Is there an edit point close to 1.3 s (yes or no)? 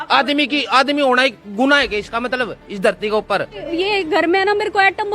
no